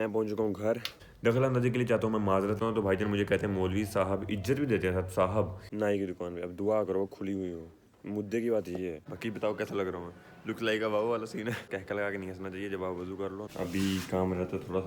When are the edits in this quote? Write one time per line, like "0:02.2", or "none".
0:02.6
0:05.6
0:09.1
0:11.7
0:13.5